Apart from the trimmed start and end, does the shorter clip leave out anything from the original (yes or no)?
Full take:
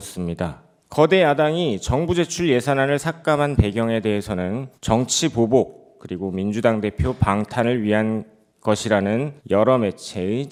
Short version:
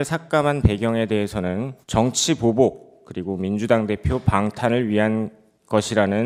no